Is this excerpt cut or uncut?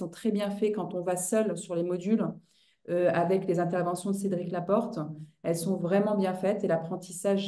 uncut